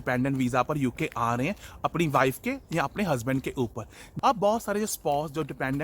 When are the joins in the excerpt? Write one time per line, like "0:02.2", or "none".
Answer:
0:04.1